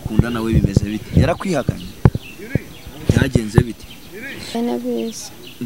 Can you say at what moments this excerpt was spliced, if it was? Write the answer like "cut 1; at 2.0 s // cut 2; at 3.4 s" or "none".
cut 1; at 4.5 s